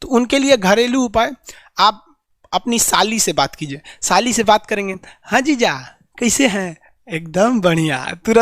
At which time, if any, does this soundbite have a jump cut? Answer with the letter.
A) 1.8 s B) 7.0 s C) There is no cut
C